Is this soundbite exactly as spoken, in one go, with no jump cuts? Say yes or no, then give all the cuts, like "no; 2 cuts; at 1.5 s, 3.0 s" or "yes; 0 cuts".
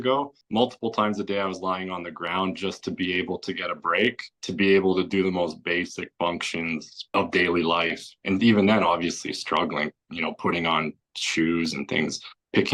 yes; 0 cuts